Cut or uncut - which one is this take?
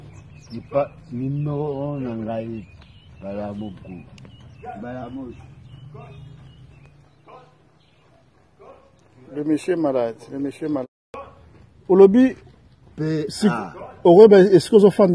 cut